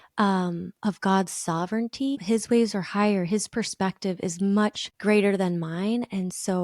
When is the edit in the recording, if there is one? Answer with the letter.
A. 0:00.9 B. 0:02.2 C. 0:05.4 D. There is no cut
B